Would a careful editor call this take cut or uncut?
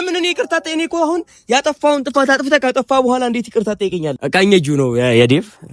cut